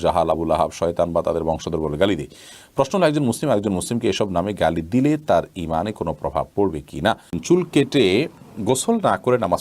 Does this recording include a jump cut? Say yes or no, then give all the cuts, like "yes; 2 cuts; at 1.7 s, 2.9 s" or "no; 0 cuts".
yes; 1 cut; at 7.4 s